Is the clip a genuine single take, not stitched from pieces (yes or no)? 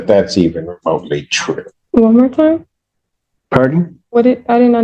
no